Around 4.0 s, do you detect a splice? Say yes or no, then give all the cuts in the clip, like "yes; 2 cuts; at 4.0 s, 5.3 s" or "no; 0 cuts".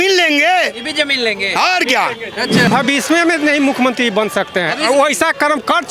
no; 1 cut; at 2.7 s